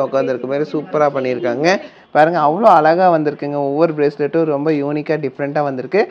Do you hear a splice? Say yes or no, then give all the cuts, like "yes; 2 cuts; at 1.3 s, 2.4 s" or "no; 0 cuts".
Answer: yes; 1 cut; at 1.9 s